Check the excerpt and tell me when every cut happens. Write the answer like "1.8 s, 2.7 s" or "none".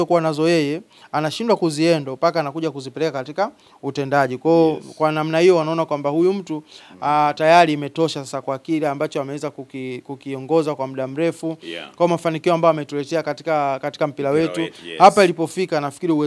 none